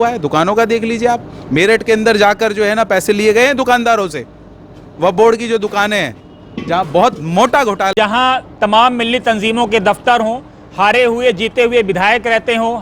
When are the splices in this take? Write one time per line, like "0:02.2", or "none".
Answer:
0:07.9